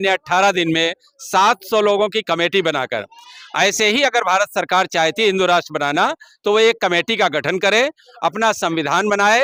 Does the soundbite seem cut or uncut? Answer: uncut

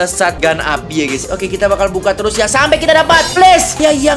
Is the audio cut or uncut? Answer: cut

